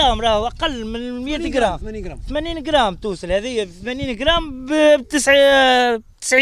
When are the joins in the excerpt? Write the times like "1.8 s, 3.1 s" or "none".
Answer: none